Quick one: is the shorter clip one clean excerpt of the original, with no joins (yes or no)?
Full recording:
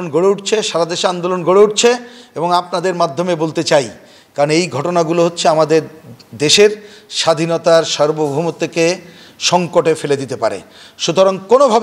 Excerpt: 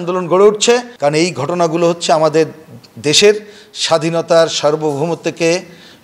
no